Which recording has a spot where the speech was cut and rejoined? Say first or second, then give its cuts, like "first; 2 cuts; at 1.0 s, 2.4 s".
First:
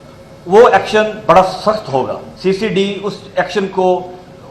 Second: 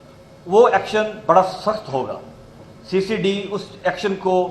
first; 1 cut; at 2.2 s